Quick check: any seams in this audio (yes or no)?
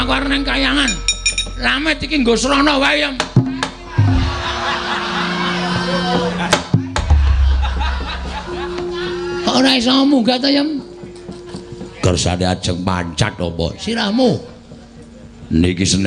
no